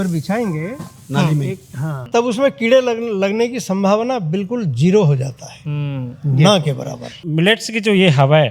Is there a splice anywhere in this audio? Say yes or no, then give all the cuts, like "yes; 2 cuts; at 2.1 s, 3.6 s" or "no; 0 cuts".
yes; 2 cuts; at 2.0 s, 7.2 s